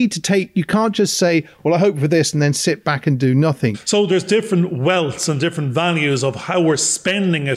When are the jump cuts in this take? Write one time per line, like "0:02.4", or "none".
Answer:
0:03.8